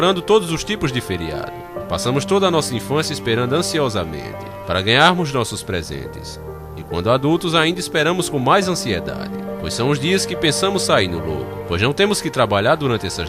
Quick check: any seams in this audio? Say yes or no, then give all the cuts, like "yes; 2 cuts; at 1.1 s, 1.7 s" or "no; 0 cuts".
yes; 1 cut; at 2.1 s